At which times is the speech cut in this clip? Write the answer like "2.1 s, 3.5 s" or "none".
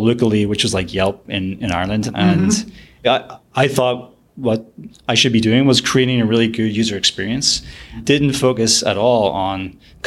2.1 s, 3.1 s, 8.0 s